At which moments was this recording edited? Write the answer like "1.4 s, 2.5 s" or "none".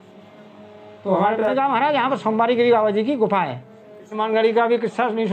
1.5 s, 4.2 s